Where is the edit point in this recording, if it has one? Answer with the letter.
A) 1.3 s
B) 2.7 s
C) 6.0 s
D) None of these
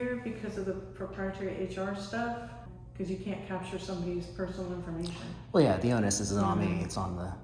B